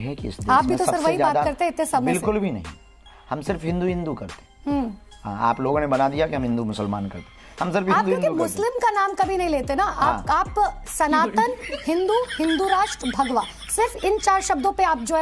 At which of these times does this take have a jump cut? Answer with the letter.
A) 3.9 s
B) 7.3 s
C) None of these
C